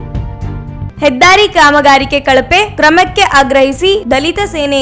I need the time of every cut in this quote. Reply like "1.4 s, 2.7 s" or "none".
0.9 s